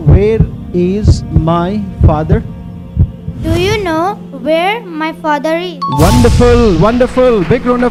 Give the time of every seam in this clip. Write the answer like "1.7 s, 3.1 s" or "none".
none